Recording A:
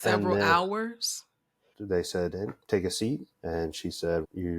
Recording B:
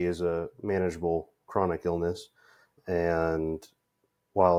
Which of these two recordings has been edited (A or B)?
A